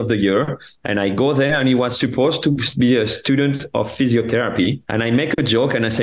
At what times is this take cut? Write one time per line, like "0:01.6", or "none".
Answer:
0:04.8